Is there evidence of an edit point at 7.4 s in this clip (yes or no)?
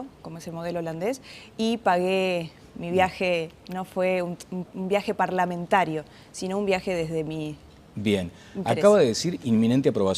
yes